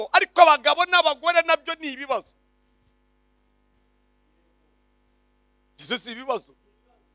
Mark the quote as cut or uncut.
uncut